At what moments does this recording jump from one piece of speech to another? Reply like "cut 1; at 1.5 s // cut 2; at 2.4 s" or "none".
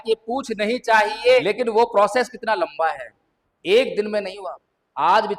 cut 1; at 1.4 s

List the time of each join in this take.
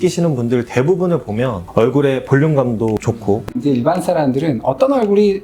cut 1; at 1.6 s // cut 2; at 3.5 s

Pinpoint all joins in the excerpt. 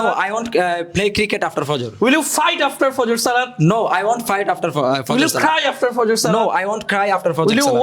none

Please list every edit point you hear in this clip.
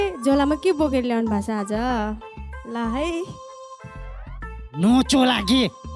cut 1; at 3.3 s // cut 2; at 4.7 s

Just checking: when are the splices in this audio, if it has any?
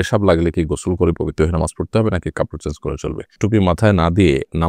cut 1; at 3.3 s

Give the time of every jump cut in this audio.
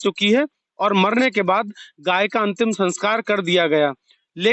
none

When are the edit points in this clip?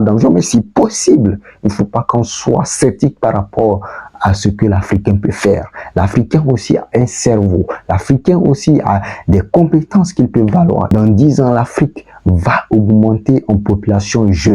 cut 1; at 10.9 s

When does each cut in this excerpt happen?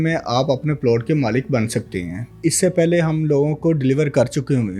cut 1; at 2.4 s

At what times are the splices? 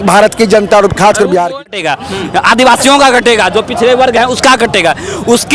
cut 1; at 1.7 s

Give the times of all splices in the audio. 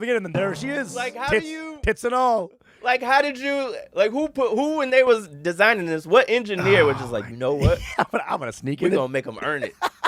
none

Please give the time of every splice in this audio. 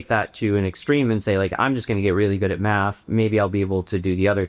none

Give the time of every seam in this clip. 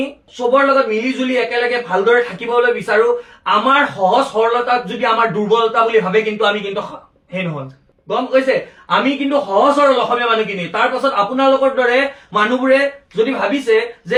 none

